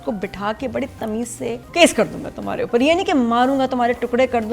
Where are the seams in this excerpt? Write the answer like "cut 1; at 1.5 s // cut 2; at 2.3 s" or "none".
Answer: cut 1; at 1.6 s